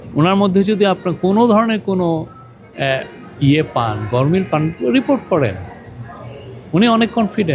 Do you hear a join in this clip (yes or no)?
no